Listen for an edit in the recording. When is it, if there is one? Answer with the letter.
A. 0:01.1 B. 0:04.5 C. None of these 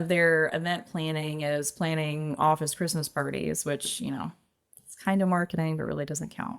C